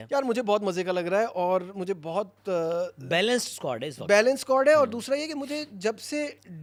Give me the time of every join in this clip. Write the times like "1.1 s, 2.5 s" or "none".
none